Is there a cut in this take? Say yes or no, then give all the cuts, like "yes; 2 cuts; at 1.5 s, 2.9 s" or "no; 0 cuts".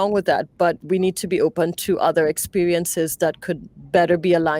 no; 0 cuts